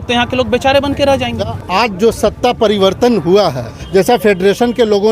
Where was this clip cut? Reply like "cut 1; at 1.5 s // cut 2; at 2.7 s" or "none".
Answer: cut 1; at 1.6 s // cut 2; at 3.7 s